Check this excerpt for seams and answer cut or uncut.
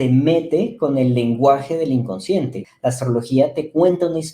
cut